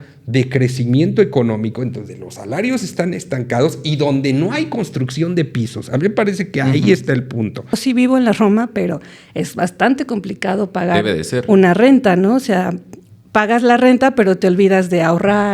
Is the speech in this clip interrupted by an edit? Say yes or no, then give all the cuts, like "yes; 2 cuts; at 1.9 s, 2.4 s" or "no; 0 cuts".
yes; 1 cut; at 7.8 s